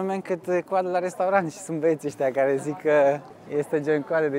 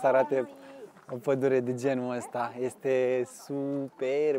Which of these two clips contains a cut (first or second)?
first